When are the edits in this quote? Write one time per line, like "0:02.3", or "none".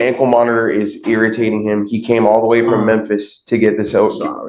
none